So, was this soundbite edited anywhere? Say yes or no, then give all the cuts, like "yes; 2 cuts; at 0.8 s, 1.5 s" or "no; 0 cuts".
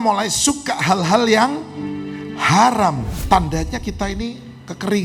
yes; 1 cut; at 3.2 s